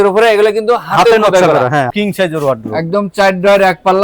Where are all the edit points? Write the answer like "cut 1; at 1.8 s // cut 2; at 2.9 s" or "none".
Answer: cut 1; at 1.9 s